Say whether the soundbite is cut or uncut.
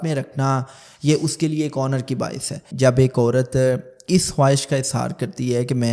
cut